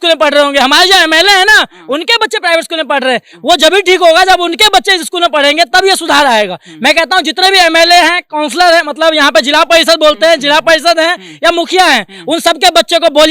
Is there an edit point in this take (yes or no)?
no